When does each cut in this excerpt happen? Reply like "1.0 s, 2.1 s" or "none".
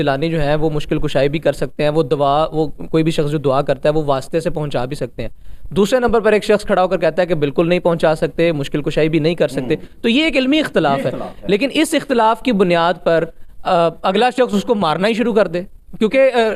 none